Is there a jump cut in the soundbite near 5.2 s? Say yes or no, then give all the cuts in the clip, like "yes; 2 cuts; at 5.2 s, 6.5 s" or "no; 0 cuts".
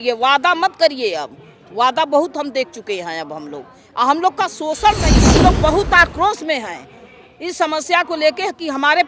yes; 1 cut; at 5.2 s